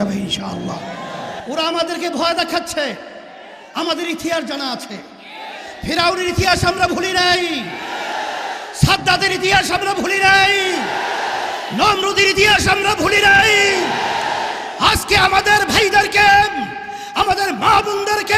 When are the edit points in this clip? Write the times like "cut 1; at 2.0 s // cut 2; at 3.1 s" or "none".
cut 1; at 1.4 s